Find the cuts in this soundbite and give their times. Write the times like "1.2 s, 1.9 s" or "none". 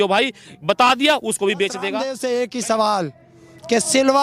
2.1 s